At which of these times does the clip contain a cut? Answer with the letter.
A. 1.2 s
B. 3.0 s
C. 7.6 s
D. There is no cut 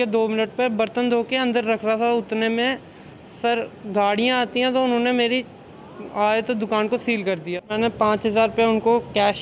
C